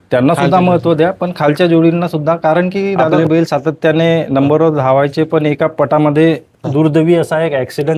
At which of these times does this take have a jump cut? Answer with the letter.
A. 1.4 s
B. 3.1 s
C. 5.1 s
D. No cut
B